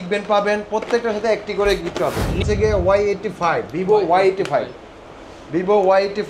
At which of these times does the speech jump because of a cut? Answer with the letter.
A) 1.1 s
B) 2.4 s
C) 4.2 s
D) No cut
B